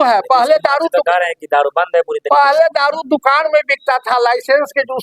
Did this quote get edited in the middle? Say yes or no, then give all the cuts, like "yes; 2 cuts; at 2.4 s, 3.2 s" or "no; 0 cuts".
no; 0 cuts